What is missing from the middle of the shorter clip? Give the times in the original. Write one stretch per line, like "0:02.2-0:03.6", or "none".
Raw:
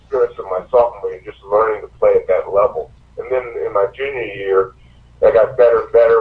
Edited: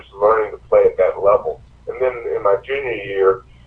none